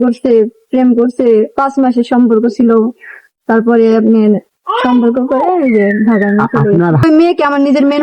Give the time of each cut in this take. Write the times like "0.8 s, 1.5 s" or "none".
7.0 s